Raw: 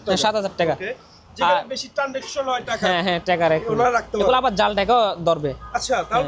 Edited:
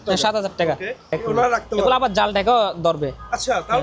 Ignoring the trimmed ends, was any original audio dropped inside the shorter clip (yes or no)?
yes